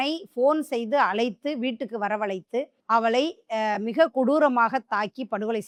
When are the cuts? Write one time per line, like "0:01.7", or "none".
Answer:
none